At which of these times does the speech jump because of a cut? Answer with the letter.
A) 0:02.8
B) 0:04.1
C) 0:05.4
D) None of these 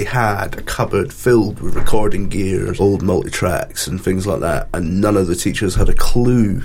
A